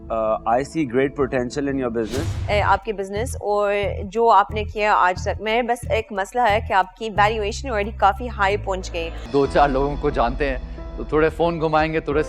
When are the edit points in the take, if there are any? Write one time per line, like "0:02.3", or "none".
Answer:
0:02.4
0:09.1